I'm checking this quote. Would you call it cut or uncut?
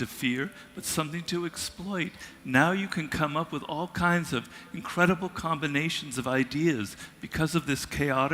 uncut